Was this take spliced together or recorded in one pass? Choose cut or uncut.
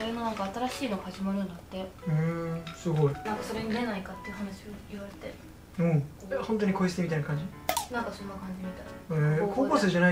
uncut